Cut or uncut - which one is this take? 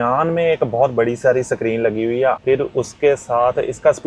uncut